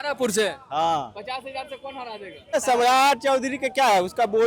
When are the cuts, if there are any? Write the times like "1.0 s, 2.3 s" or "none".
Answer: 2.5 s